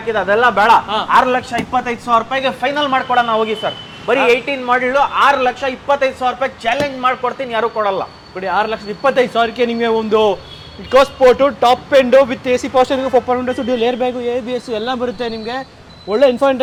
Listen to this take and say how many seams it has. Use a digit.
0